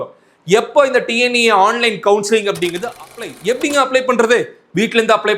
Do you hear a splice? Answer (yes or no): yes